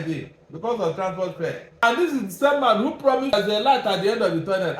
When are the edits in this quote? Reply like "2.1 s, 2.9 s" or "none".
1.8 s, 3.3 s